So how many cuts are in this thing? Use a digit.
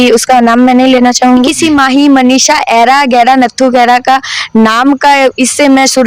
1